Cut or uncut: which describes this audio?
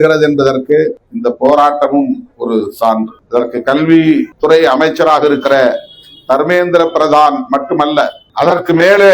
cut